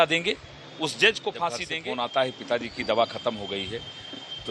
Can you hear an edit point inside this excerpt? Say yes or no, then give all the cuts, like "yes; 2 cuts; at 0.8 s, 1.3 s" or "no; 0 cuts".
yes; 1 cut; at 1.7 s